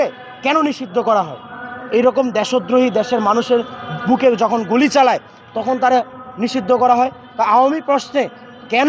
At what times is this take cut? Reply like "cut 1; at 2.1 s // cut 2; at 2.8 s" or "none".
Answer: none